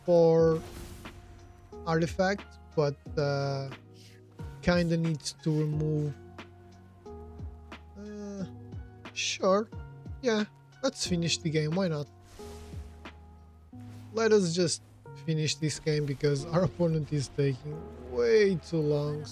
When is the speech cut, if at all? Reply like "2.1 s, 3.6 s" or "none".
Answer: none